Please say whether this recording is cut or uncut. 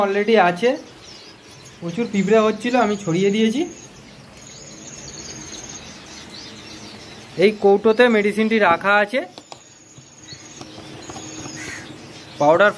uncut